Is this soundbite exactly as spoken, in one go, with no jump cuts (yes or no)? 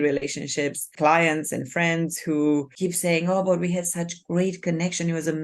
no